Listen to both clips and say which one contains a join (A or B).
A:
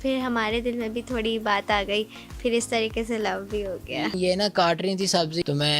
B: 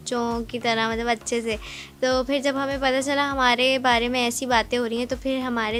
A